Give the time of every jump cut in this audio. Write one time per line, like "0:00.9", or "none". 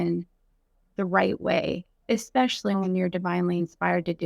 0:02.0

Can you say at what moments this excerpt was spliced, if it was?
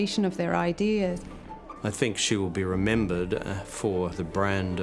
0:01.4

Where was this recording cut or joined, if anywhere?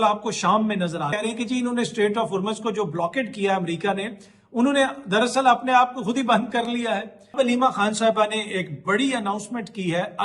0:01.2
0:07.4

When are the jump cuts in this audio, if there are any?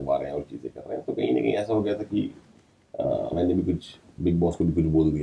none

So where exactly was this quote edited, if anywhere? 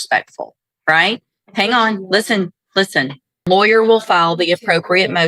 0:03.4

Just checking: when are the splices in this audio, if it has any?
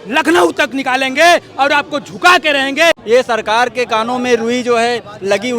0:03.0

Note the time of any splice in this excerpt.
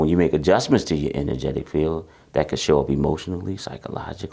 none

